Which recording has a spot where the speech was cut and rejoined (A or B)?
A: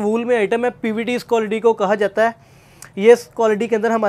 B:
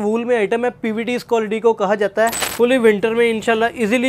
B